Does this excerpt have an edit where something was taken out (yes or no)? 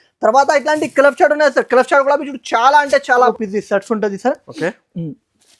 yes